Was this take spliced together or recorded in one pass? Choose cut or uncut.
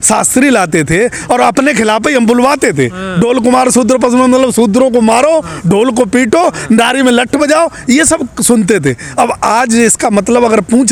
uncut